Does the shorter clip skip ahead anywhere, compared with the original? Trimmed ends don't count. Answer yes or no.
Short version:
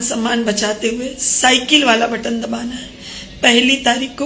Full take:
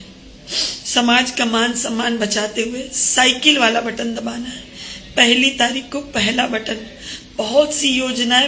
no